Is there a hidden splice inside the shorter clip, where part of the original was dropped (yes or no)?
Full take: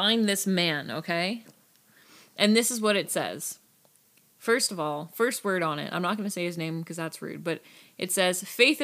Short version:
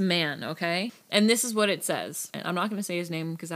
yes